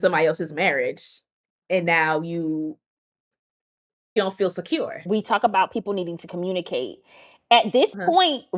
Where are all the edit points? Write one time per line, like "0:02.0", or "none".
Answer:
0:05.0

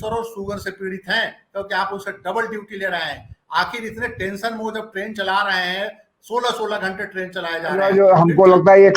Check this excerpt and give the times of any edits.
0:07.9

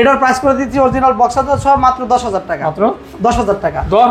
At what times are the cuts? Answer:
none

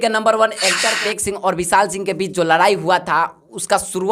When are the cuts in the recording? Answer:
0:01.0

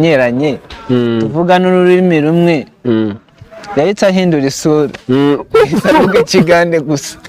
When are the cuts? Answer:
none

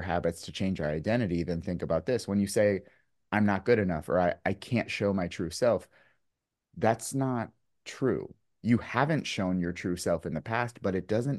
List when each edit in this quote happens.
none

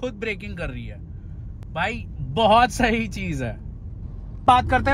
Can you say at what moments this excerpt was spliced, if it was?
none

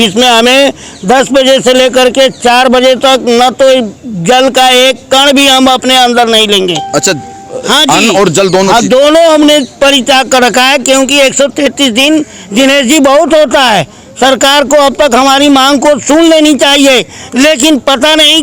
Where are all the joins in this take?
none

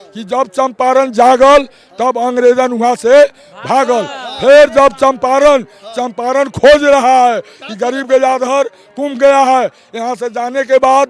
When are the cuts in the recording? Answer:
none

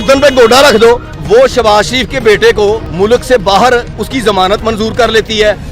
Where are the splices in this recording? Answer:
0:01.1
0:02.9
0:04.6

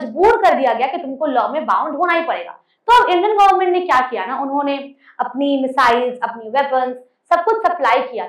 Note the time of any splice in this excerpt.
0:02.7

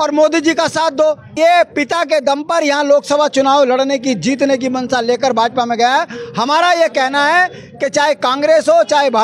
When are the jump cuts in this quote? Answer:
0:01.3

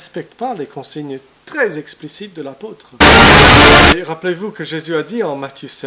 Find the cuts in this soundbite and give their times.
0:03.0
0:03.9

